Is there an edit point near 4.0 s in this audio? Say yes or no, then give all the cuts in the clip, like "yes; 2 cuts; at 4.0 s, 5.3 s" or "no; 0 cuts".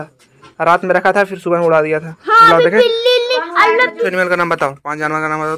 yes; 1 cut; at 4.0 s